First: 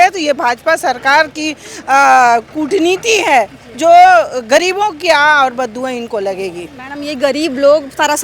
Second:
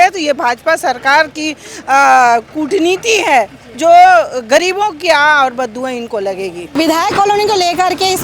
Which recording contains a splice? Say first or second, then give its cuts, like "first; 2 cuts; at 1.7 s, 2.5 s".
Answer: second; 1 cut; at 6.6 s